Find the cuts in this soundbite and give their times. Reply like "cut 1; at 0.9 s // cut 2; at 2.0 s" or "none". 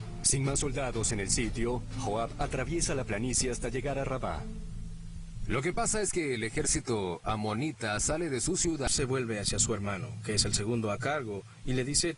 none